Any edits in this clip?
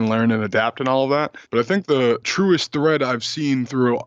yes; 1 cut; at 1.4 s

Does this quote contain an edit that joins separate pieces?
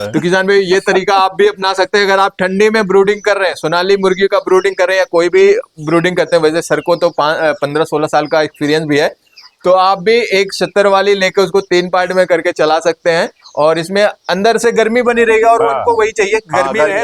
no; 0 cuts

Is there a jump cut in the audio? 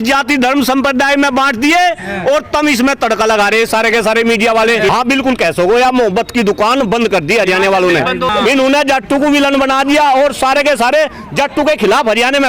yes; 2 cuts; at 4.9 s, 8.3 s

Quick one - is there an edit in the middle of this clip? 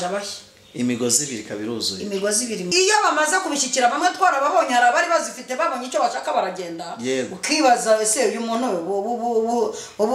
yes; 1 cut; at 2.7 s

